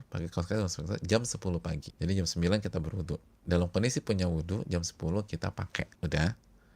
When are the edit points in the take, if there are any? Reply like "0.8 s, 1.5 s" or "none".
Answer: 1.9 s, 3.3 s, 5.9 s